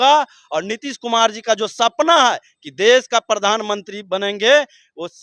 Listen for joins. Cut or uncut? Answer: uncut